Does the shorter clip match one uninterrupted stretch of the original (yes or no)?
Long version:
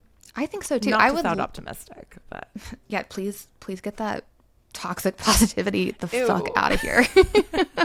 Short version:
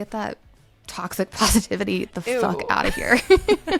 yes